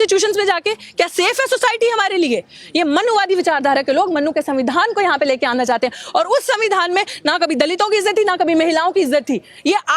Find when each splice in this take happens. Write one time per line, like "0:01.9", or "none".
none